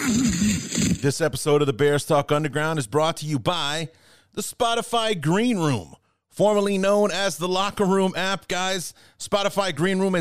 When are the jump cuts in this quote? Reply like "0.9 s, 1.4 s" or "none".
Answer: 1.0 s